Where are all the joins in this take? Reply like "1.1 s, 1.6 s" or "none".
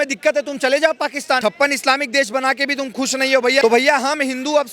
1.4 s, 3.6 s

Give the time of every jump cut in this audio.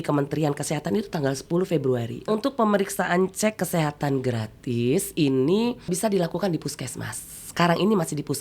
2.3 s, 5.9 s

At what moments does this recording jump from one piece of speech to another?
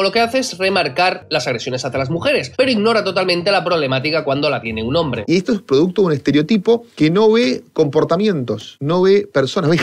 1.2 s, 5.2 s, 6.9 s

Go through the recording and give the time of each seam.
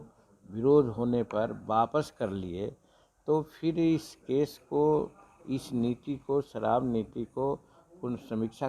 none

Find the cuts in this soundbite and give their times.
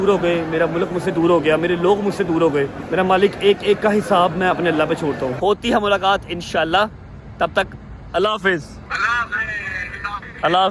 2.8 s, 5.3 s, 8.8 s

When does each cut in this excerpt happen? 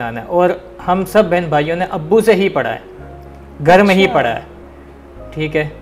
none

